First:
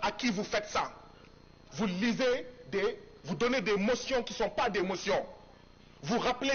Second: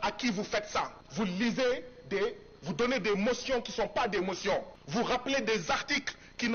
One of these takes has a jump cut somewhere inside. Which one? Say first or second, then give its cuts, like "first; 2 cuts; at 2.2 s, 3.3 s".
second; 2 cuts; at 1.0 s, 4.8 s